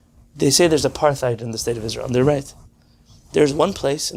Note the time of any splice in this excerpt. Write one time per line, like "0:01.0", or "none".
none